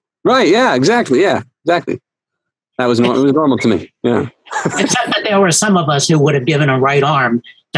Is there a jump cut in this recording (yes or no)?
no